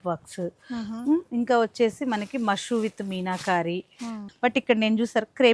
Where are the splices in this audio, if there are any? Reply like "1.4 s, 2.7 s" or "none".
4.2 s